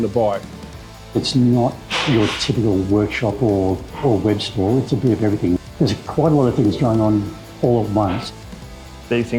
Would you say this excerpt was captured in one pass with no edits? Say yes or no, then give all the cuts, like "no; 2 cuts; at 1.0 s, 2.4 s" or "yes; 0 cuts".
no; 3 cuts; at 0.9 s, 5.6 s, 8.4 s